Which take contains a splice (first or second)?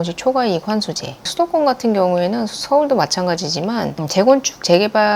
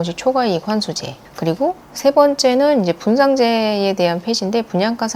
second